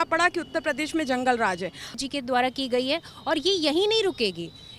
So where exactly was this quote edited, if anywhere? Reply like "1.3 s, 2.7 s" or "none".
1.9 s